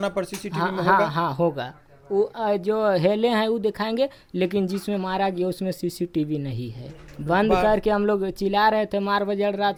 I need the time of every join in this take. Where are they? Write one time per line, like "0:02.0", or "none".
none